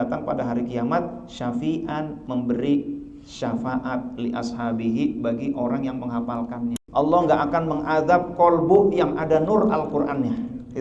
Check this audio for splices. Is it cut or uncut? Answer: cut